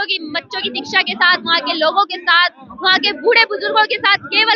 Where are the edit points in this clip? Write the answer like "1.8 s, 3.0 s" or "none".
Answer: none